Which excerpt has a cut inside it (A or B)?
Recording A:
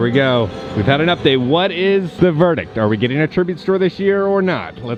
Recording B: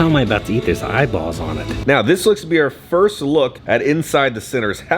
B